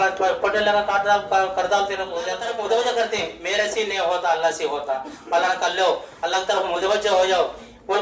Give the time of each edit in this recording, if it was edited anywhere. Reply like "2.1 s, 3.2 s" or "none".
2.4 s